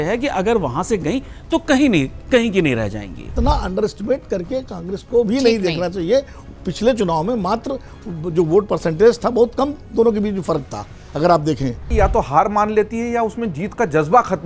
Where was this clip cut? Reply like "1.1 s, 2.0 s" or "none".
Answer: 3.3 s, 11.9 s